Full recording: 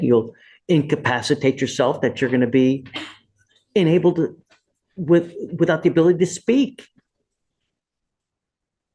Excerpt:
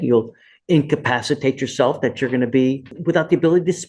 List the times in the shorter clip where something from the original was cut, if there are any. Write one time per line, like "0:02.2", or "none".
0:02.9